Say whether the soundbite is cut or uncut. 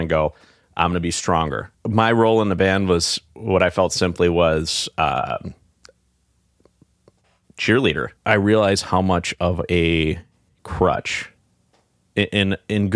cut